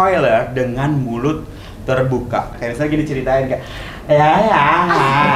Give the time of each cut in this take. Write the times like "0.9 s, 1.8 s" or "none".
2.6 s

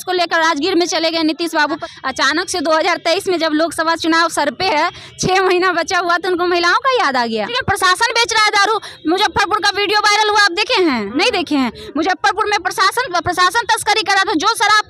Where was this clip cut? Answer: 1.8 s, 7.5 s

